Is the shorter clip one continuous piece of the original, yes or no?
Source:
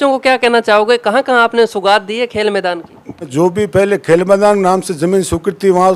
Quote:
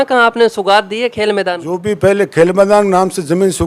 no